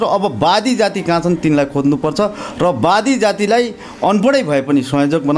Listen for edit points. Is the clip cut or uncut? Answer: uncut